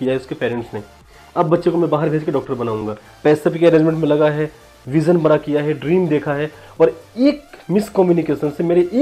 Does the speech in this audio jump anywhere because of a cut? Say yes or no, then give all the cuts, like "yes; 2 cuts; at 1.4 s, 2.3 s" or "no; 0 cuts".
no; 0 cuts